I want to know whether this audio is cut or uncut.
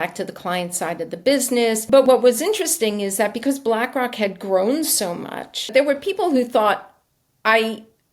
cut